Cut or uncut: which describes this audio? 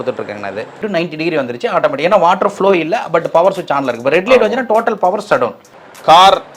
cut